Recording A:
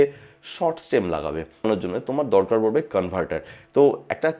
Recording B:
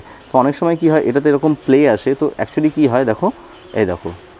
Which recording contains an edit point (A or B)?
A